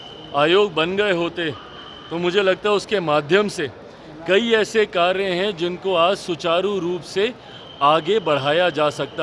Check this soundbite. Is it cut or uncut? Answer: uncut